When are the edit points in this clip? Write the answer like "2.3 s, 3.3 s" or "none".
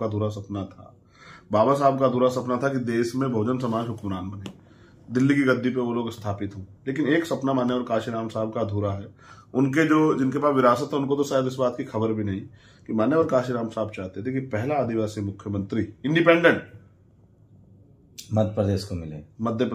none